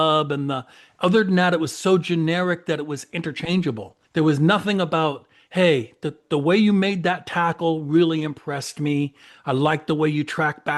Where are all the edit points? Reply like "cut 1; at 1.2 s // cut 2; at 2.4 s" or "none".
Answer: cut 1; at 3.9 s

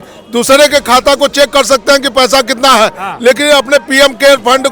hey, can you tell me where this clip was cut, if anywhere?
none

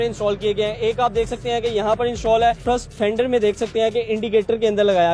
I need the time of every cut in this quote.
cut 1; at 2.6 s

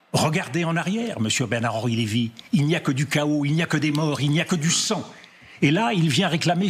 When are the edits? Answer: none

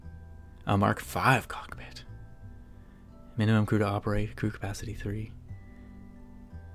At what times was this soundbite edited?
cut 1; at 5.6 s

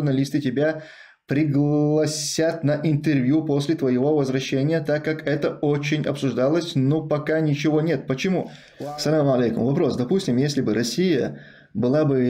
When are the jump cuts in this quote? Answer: cut 1; at 8.6 s

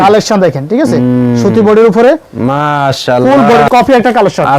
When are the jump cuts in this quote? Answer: cut 1; at 3.7 s

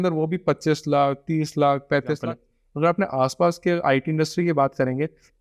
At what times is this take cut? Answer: cut 1; at 2.2 s

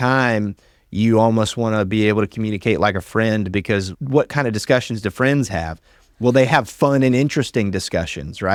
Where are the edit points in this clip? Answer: none

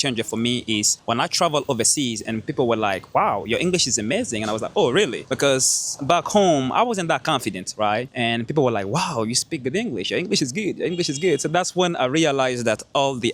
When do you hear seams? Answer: cut 1; at 0.9 s // cut 2; at 5.2 s // cut 3; at 8.1 s

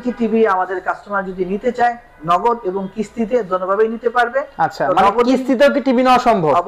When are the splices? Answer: none

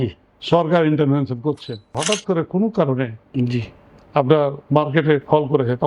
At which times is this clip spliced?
cut 1; at 2.0 s

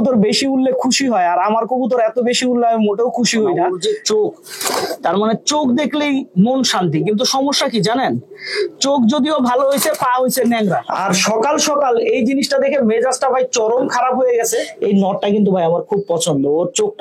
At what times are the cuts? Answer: cut 1; at 3.7 s // cut 2; at 10.9 s // cut 3; at 14.7 s

